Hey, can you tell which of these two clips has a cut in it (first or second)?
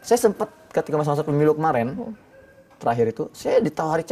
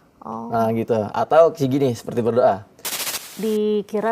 second